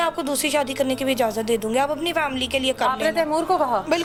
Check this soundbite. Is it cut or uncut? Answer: uncut